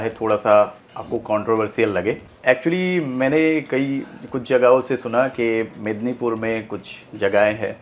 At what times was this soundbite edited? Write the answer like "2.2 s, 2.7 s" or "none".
none

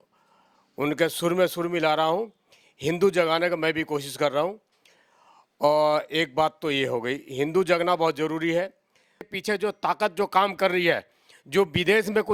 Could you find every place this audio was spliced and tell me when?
9.4 s

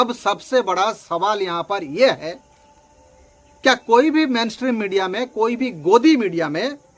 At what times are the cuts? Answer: none

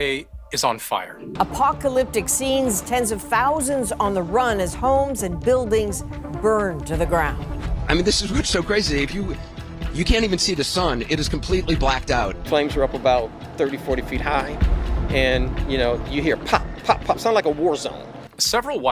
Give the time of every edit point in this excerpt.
none

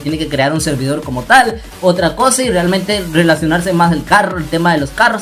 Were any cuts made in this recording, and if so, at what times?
none

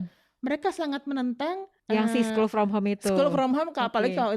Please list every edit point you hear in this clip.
1.7 s

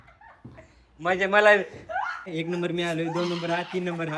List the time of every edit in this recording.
2.3 s

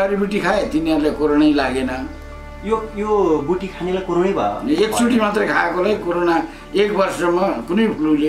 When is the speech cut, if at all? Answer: none

